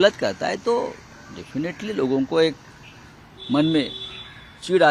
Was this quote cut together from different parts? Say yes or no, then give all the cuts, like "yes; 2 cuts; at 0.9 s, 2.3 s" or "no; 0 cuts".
no; 0 cuts